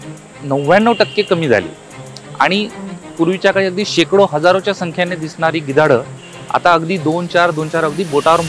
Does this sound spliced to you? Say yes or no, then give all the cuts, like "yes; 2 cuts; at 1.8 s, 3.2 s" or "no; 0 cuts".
no; 0 cuts